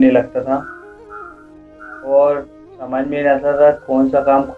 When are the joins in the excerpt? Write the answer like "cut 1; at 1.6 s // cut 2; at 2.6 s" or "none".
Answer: none